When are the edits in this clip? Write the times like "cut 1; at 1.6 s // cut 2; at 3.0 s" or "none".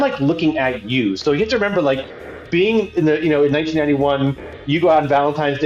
none